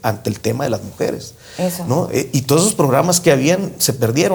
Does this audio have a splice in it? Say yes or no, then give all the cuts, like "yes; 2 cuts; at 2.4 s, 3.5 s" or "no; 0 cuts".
no; 0 cuts